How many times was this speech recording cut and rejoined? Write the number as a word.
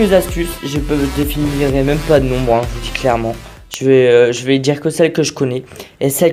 zero